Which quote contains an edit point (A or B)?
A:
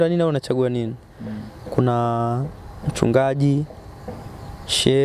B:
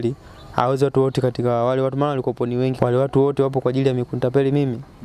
B